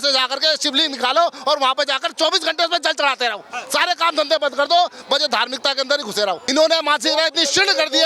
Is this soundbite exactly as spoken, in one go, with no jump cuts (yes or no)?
no